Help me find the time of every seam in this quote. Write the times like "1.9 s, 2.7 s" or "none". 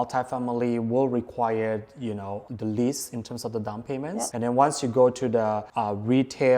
2.4 s, 4.3 s, 5.7 s